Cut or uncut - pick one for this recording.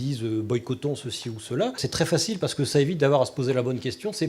cut